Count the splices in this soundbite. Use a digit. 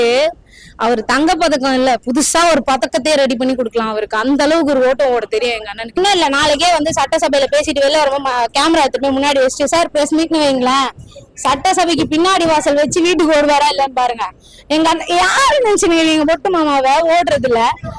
1